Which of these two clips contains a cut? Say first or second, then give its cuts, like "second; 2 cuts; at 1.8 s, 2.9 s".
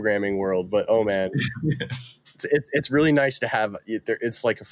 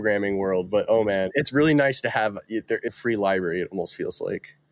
second; 2 cuts; at 1.3 s, 2.9 s